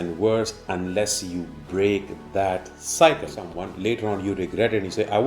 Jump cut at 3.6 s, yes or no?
yes